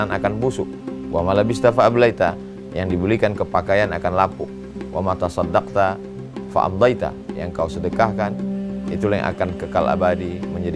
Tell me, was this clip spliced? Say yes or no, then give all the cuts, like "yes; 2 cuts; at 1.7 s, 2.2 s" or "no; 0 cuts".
no; 0 cuts